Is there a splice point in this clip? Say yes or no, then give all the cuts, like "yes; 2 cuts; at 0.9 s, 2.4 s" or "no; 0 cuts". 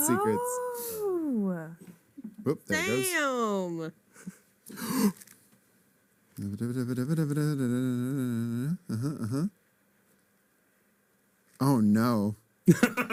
no; 0 cuts